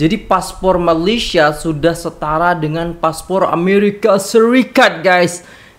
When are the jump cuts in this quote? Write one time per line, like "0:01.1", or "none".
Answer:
none